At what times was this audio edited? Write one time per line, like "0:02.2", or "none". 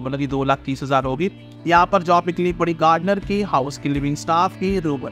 0:01.5